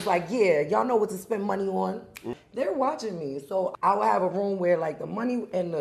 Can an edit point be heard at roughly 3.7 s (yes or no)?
yes